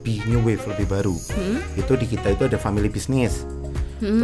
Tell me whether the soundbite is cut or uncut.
uncut